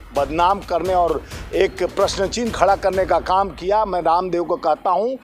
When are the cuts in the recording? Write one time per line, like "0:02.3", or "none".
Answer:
none